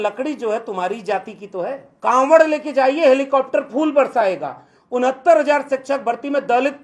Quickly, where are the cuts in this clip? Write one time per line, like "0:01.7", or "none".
0:01.8